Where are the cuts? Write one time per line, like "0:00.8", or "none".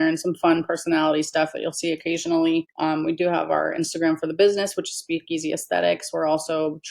0:02.7